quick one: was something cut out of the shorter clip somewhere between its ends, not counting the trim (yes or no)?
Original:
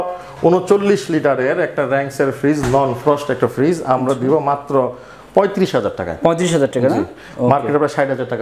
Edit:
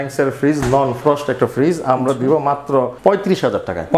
yes